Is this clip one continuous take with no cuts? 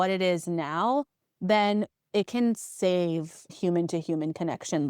no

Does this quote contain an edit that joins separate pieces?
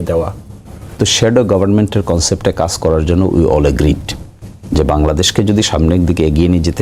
yes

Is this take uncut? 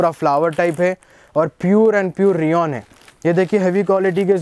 yes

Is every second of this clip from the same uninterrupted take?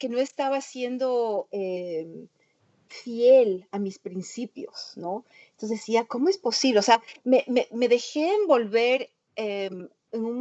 yes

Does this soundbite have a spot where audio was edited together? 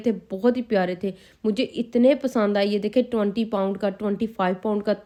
no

